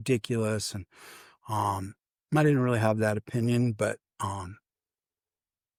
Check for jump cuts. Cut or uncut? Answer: uncut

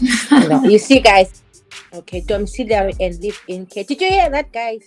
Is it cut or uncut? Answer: cut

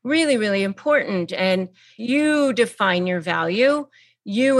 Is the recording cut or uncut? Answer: cut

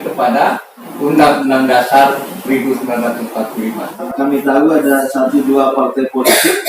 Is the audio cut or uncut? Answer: cut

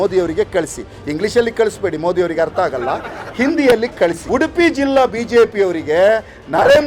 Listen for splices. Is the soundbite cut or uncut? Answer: cut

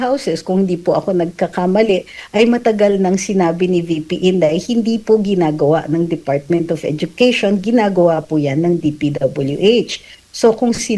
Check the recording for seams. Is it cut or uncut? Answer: uncut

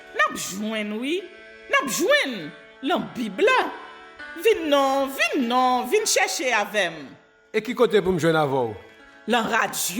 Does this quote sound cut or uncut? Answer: uncut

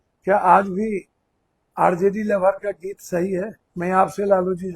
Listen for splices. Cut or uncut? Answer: cut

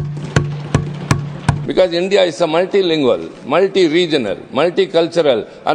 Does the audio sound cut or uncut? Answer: cut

